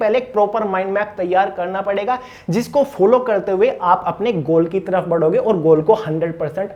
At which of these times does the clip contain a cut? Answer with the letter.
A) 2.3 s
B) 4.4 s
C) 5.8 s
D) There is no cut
D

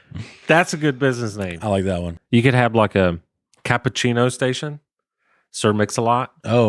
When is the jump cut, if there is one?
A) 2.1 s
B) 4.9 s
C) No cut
A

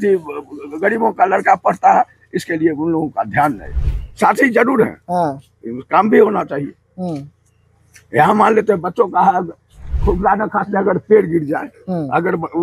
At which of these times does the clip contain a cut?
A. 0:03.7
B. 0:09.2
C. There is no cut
A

